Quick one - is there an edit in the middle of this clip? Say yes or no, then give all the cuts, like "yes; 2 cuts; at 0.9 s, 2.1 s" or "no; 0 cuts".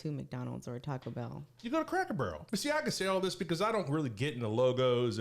yes; 1 cut; at 2.4 s